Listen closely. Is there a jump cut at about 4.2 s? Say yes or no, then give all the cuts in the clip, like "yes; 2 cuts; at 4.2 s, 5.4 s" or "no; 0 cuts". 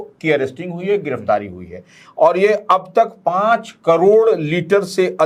no; 0 cuts